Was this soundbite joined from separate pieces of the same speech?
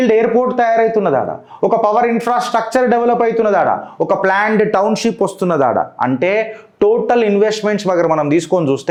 no; 0 cuts

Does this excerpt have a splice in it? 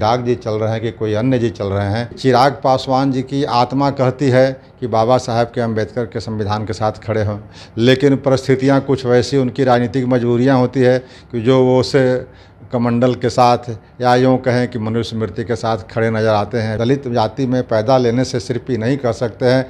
yes; 2 cuts; at 2.1 s, 16.7 s

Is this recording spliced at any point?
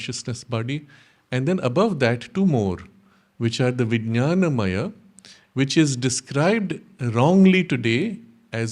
no; 0 cuts

